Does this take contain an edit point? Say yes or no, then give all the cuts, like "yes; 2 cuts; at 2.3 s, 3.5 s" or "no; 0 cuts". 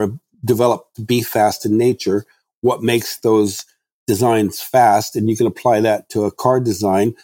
no; 0 cuts